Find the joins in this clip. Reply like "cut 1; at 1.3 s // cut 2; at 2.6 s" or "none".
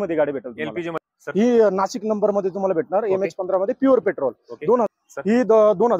cut 1; at 1.0 s // cut 2; at 4.9 s